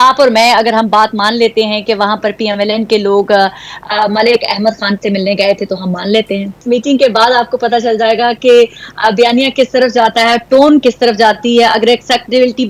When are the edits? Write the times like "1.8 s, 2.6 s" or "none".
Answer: 6.6 s